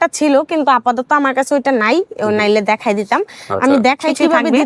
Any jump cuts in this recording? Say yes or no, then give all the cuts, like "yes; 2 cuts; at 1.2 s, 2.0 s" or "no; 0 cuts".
no; 0 cuts